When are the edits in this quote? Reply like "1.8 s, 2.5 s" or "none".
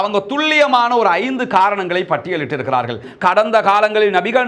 3.1 s